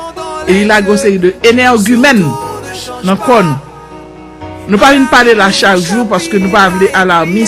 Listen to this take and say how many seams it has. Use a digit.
1